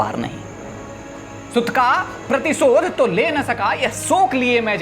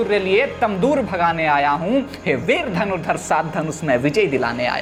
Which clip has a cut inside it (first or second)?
first